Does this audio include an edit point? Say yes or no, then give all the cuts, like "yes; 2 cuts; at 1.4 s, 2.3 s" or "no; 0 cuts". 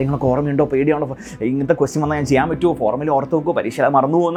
no; 0 cuts